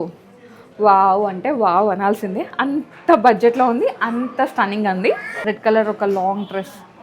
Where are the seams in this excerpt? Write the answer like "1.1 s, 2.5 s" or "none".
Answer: 5.3 s